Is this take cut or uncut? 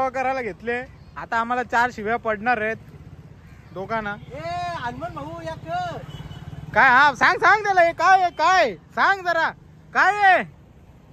uncut